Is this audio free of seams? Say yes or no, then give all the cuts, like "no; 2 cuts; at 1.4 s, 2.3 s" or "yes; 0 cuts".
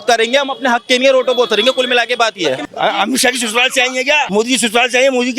no; 2 cuts; at 2.6 s, 4.3 s